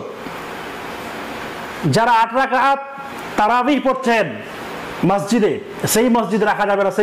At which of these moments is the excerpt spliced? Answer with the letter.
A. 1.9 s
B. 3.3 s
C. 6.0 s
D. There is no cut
D